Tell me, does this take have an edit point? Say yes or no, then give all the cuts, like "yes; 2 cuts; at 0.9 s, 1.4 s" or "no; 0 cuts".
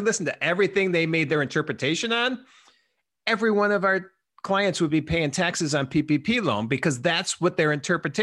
no; 0 cuts